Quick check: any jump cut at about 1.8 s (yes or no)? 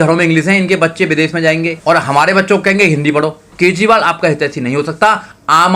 yes